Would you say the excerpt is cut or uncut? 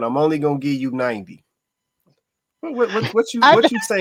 uncut